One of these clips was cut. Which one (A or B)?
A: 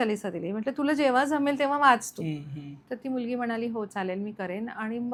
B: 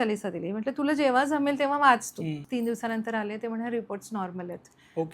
B